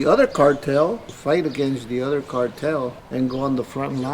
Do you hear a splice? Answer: yes; 2 cuts; at 1.1 s, 3.0 s

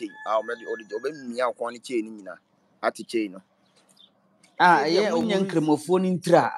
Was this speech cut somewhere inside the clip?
yes; 1 cut; at 5.3 s

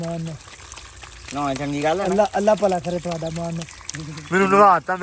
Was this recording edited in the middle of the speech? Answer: no; 0 cuts

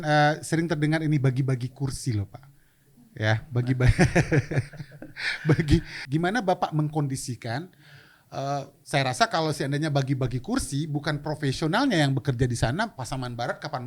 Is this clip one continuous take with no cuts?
yes; 0 cuts

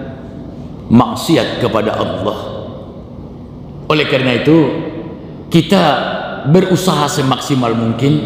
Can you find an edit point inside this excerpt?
yes; 1 cut; at 3.8 s

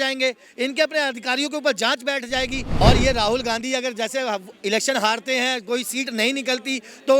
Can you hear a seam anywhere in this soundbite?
yes; 1 cut; at 2.8 s

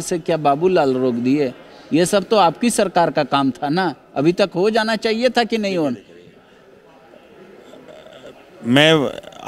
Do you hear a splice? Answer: no; 0 cuts

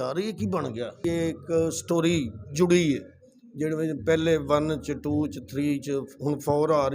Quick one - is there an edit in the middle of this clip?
yes; 1 cut; at 1.0 s

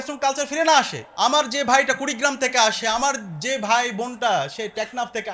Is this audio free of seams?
yes; 0 cuts

